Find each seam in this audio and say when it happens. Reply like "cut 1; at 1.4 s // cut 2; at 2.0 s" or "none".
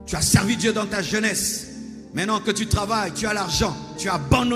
none